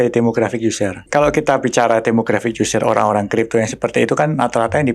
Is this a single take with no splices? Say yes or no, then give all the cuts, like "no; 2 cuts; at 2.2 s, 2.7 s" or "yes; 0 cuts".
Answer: no; 1 cut; at 1.1 s